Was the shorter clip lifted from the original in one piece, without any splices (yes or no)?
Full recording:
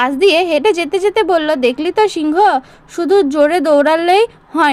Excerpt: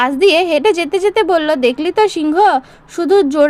yes